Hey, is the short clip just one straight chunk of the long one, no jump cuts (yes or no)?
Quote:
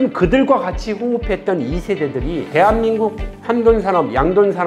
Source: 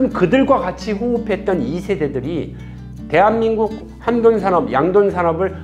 no